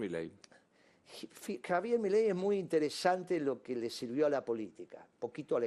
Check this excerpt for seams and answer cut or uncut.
uncut